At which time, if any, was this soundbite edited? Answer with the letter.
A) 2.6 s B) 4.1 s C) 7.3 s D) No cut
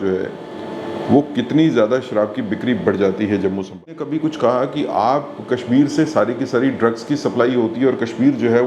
B